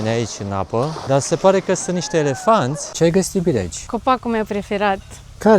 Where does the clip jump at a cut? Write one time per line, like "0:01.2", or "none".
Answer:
0:01.0
0:02.8
0:03.8